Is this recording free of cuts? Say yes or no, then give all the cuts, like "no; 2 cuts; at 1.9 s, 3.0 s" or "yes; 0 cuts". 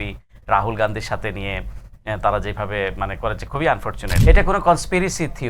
no; 1 cut; at 4.0 s